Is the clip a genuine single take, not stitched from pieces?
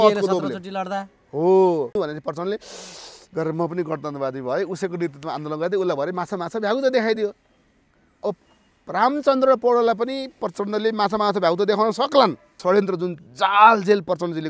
no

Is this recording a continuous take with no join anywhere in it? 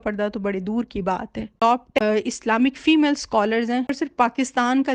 no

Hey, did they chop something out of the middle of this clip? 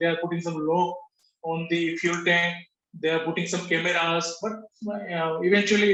no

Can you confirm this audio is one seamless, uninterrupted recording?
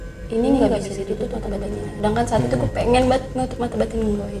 yes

